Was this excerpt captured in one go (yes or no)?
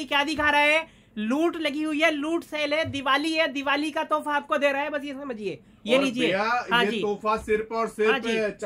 yes